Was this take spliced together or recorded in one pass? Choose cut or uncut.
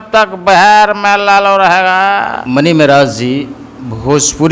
cut